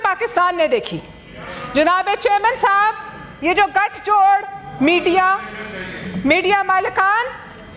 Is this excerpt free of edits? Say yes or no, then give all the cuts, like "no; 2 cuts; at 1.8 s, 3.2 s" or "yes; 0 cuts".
yes; 0 cuts